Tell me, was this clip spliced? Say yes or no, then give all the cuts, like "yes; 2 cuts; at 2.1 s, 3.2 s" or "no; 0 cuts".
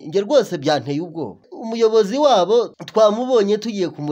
yes; 2 cuts; at 1.5 s, 2.7 s